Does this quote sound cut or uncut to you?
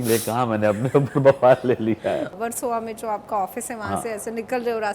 cut